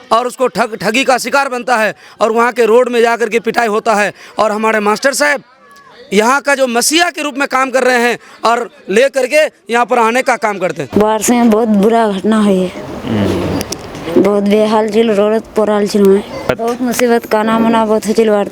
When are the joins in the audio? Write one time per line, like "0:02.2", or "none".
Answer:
0:10.8
0:16.5